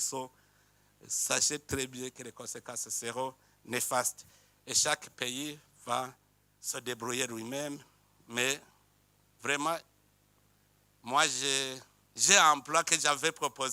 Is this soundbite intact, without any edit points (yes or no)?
yes